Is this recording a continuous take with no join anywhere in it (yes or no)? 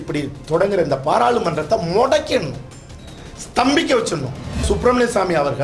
no